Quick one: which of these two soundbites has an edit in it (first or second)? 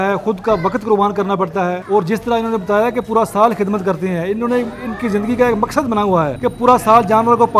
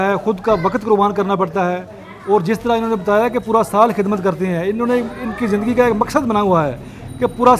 first